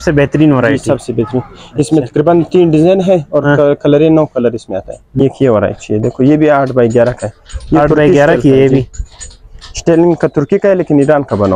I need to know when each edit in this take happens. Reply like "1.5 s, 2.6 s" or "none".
5.0 s